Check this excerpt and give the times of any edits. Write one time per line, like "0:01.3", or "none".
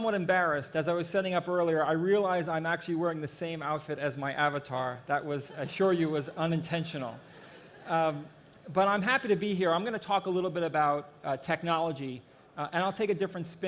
none